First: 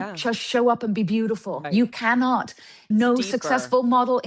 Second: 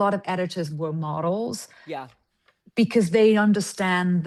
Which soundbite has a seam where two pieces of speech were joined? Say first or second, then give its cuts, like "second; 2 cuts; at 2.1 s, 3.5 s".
first; 2 cuts; at 1.6 s, 2.8 s